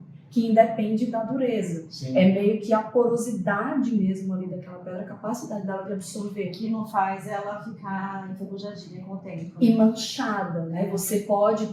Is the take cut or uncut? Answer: uncut